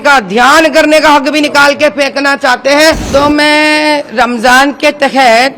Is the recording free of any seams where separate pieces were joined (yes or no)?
no